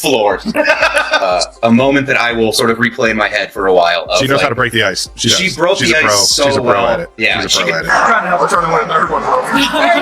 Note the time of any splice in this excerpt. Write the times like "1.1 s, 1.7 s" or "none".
1.2 s, 7.8 s